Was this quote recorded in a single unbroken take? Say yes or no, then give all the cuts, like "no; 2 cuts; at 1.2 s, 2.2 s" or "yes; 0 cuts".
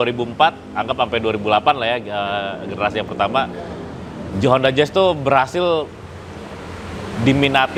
yes; 0 cuts